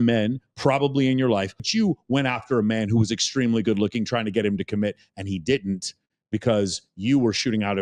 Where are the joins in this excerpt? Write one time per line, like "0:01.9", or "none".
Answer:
0:01.7